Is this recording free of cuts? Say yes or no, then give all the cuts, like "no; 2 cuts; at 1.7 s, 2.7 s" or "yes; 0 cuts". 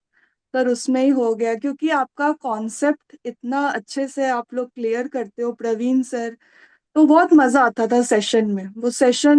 yes; 0 cuts